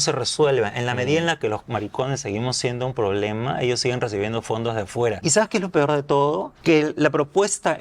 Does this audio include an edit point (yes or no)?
yes